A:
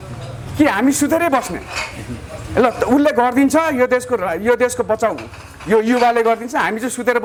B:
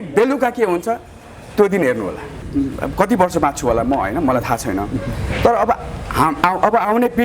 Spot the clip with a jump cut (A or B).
B